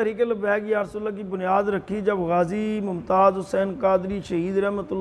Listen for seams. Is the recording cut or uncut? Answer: uncut